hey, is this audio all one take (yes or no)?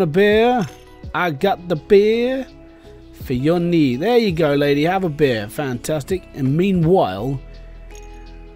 yes